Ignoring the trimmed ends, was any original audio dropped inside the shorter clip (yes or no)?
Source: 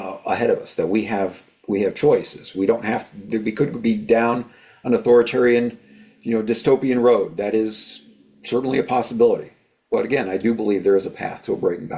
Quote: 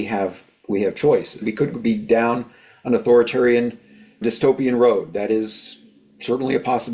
yes